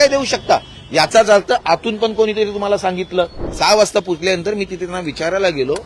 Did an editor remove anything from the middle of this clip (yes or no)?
yes